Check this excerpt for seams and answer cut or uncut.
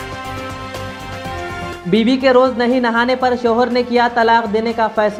uncut